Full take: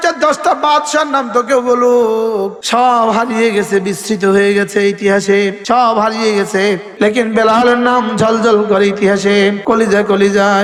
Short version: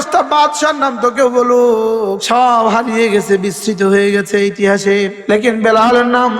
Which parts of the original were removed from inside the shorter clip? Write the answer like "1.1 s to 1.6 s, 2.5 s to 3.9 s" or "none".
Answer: 2.5 s to 2.6 s, 5.6 s to 6.9 s